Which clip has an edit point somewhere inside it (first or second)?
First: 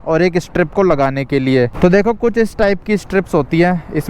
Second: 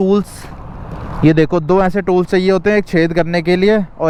first